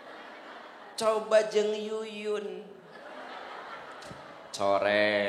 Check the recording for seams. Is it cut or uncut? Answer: uncut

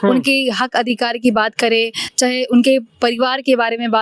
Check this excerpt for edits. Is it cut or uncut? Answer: uncut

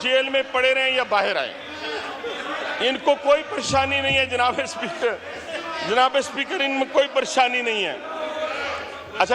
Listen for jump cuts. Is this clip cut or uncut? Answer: uncut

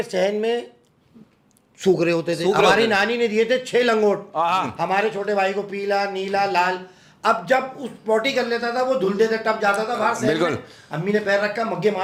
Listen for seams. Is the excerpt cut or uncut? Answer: uncut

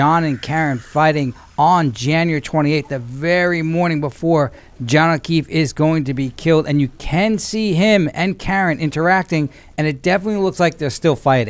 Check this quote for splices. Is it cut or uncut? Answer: uncut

